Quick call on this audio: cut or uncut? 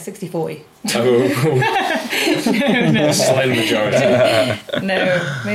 uncut